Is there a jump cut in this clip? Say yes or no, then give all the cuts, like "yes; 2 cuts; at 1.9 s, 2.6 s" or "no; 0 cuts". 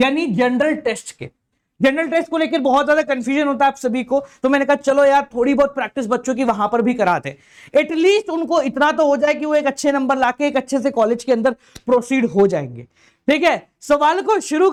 no; 0 cuts